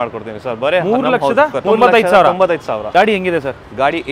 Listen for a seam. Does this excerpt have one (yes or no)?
yes